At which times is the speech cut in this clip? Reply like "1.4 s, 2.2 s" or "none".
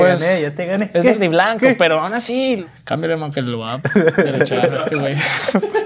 2.6 s